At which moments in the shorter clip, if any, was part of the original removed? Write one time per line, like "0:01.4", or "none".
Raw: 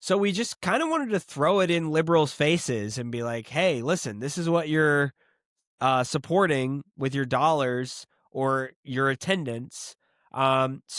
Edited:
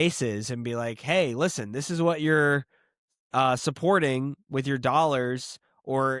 none